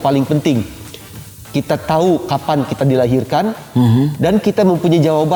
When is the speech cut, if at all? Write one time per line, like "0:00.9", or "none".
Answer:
none